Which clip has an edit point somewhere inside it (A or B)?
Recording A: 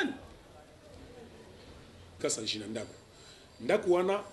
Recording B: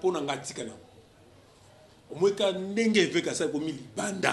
A